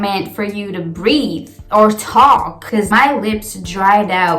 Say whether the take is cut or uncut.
cut